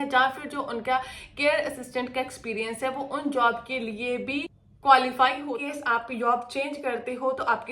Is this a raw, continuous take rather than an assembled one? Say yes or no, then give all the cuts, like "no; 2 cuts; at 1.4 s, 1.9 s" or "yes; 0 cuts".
no; 2 cuts; at 4.6 s, 5.4 s